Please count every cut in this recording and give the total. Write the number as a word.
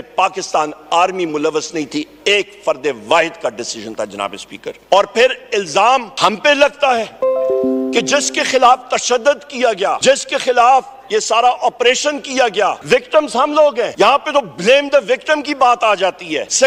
two